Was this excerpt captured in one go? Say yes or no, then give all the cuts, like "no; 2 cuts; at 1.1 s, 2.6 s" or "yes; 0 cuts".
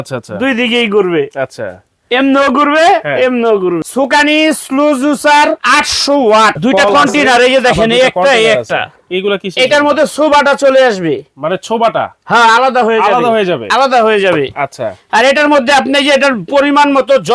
no; 2 cuts; at 3.8 s, 6.6 s